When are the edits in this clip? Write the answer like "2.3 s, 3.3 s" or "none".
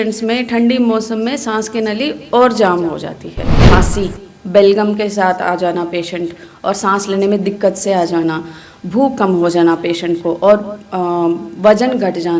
3.6 s